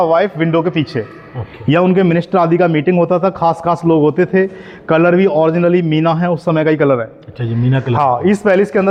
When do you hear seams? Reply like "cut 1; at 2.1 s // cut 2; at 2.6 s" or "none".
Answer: none